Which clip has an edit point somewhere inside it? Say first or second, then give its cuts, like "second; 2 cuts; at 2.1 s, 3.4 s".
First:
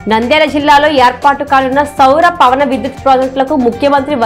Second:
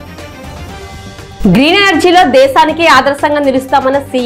second; 1 cut; at 1.4 s